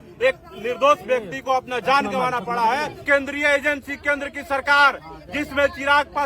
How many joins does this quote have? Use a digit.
1